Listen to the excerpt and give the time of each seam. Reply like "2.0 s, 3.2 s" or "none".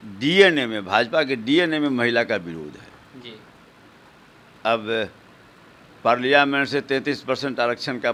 none